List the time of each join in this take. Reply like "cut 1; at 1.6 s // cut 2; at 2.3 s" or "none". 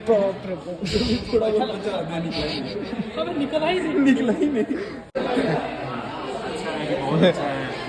cut 1; at 5.0 s